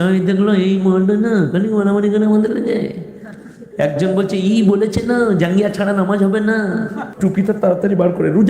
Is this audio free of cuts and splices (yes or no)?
no